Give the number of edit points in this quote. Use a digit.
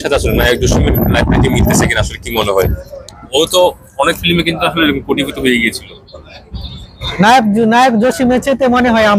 0